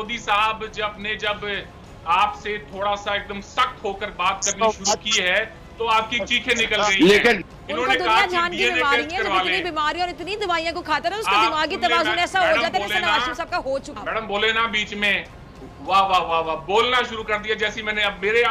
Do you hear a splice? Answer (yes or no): no